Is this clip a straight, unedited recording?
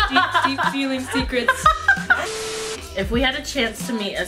no; 1 cut; at 2.4 s

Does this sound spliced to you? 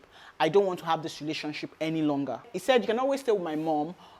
yes; 1 cut; at 2.5 s

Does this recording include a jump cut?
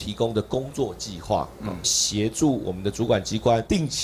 no; 0 cuts

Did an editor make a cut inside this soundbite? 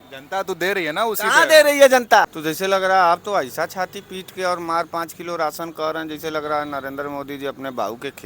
yes; 1 cut; at 2.3 s

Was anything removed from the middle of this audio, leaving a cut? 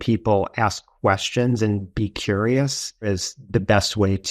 yes; 1 cut; at 3.1 s

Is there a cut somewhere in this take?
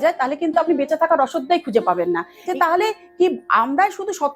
yes; 1 cut; at 2.3 s

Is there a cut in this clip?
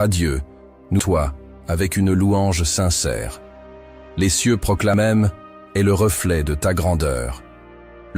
yes; 2 cuts; at 1.0 s, 4.9 s

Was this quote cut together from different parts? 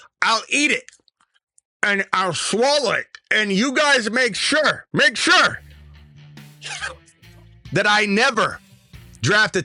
no; 0 cuts

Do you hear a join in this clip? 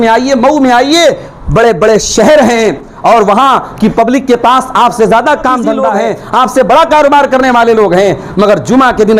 yes; 1 cut; at 5.9 s

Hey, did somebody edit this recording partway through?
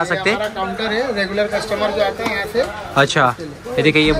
no; 0 cuts

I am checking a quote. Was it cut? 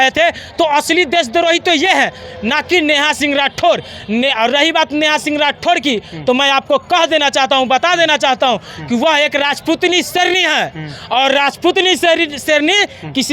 no; 0 cuts

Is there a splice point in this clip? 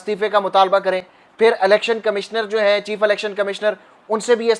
no; 0 cuts

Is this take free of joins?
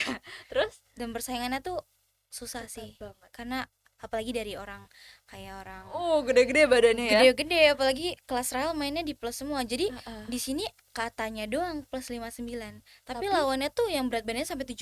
no; 1 cut; at 5.9 s

